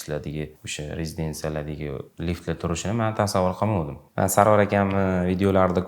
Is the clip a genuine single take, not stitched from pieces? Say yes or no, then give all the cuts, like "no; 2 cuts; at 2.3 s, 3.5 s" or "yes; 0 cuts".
no; 1 cut; at 4.0 s